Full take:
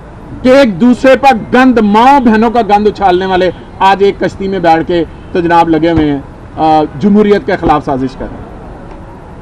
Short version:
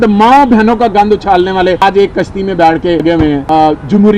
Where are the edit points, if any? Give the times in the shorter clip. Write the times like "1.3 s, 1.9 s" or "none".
1.8 s, 3.2 s